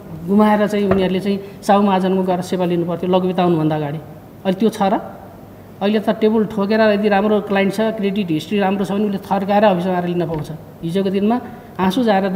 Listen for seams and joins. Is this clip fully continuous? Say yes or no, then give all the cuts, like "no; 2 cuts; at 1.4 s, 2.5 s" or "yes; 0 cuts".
yes; 0 cuts